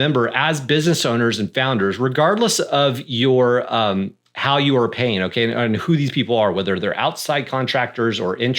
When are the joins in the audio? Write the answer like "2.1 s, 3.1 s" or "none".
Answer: none

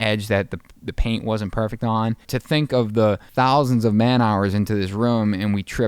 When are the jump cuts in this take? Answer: 2.2 s, 3.3 s

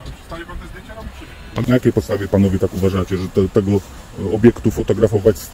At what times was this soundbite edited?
1.6 s

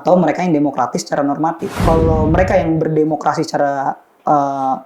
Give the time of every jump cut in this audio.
1.7 s

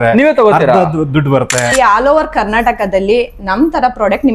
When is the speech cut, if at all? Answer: 1.7 s

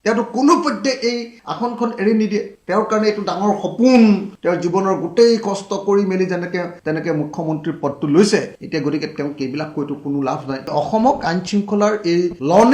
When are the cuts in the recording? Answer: 10.6 s

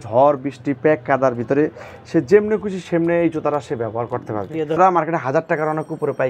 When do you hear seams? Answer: 4.8 s

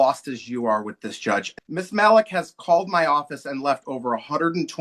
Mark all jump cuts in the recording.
1.5 s

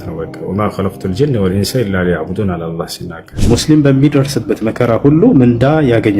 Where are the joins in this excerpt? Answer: 3.3 s

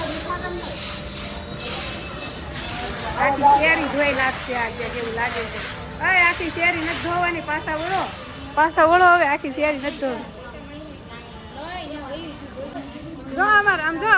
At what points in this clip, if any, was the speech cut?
12.7 s

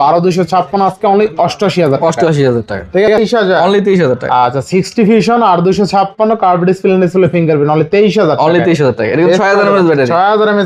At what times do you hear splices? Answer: 3.2 s

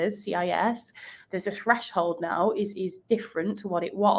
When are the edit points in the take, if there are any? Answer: none

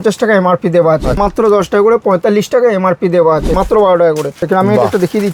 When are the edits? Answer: 1.2 s, 3.6 s, 4.4 s

